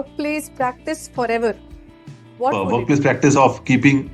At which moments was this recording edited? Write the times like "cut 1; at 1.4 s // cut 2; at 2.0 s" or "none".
cut 1; at 2.6 s